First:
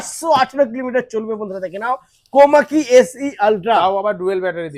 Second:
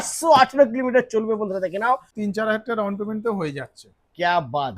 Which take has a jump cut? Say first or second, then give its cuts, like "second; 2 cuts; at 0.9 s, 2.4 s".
second; 1 cut; at 2.1 s